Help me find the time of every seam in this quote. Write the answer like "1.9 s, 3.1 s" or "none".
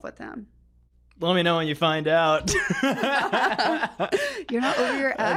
none